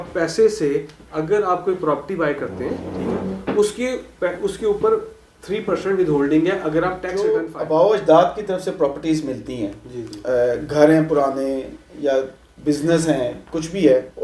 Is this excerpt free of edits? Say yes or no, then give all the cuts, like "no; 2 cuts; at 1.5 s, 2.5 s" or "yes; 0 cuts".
no; 1 cut; at 7.1 s